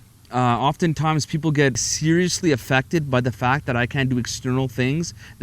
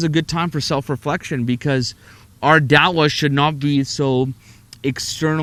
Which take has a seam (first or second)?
first